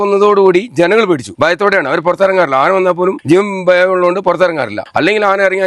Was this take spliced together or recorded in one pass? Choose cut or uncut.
cut